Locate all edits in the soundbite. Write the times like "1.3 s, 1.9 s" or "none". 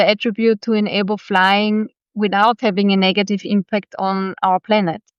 none